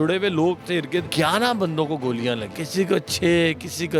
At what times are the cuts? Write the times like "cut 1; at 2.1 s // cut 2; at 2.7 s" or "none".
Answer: cut 1; at 1.1 s // cut 2; at 2.5 s